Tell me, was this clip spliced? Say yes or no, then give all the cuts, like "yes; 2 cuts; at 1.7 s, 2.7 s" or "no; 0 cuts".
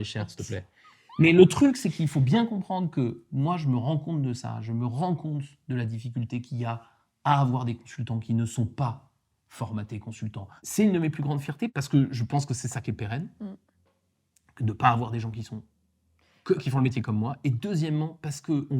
yes; 1 cut; at 10.6 s